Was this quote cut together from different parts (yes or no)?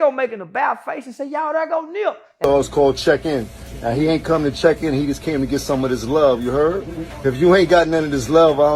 yes